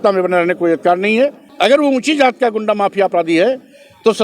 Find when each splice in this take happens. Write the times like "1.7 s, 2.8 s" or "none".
1.4 s